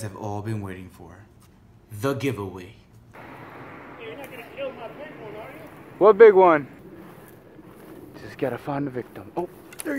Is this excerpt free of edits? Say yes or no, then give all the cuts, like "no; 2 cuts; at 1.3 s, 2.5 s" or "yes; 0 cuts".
no; 2 cuts; at 3.2 s, 6.8 s